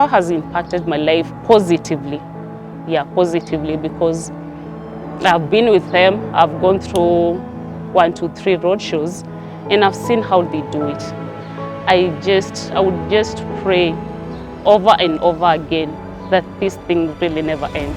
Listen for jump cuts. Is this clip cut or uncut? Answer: uncut